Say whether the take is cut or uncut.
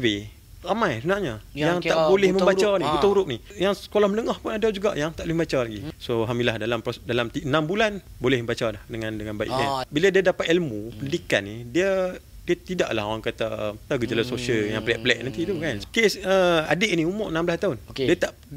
cut